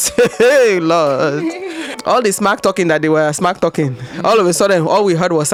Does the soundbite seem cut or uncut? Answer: uncut